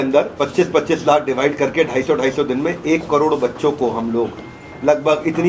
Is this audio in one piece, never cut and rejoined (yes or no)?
yes